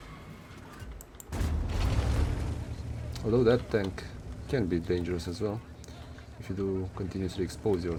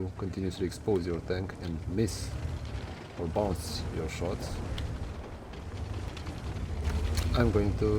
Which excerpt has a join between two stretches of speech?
second; 1 cut; at 6.1 s

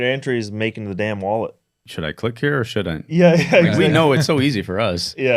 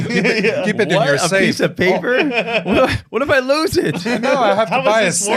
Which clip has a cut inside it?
first; 1 cut; at 1.9 s

